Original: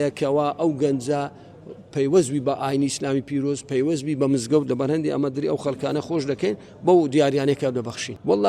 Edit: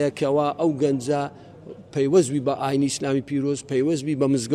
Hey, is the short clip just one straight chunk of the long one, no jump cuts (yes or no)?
yes